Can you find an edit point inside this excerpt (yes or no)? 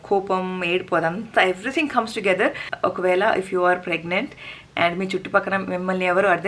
yes